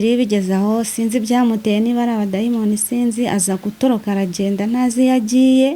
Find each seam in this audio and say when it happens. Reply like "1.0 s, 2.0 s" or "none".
none